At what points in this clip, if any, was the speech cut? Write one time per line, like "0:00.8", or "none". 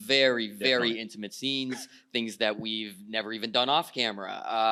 none